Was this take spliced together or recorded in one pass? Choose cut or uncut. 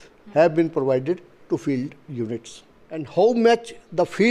cut